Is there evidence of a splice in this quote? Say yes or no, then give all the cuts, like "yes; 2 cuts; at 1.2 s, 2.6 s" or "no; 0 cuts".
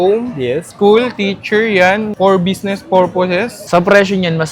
no; 0 cuts